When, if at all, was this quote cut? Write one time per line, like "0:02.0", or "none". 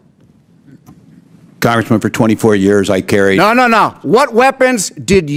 none